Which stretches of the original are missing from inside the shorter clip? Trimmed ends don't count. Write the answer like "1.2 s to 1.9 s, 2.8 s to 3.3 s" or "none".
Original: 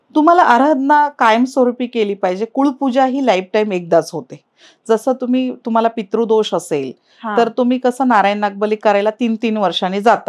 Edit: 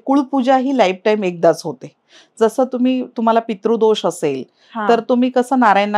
none